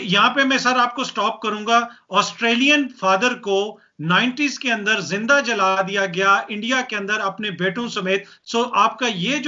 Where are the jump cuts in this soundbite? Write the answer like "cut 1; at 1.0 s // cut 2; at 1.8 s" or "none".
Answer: none